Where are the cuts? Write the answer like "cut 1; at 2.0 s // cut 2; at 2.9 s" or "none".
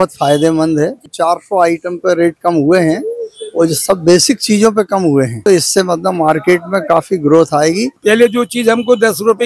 cut 1; at 1.1 s // cut 2; at 5.4 s // cut 3; at 7.9 s